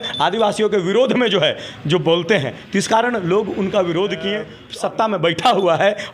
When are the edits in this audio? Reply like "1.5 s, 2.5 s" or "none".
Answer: 4.6 s